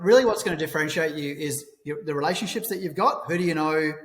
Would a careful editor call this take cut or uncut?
uncut